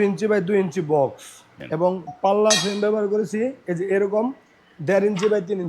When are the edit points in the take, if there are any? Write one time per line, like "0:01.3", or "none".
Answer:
0:01.5